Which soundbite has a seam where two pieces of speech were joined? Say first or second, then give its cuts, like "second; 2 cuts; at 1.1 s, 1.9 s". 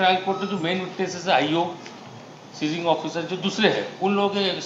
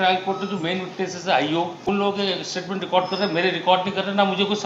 second; 1 cut; at 1.9 s